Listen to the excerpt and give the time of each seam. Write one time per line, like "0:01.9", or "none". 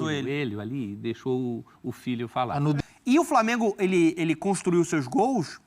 0:02.8